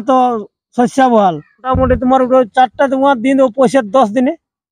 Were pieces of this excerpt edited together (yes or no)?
yes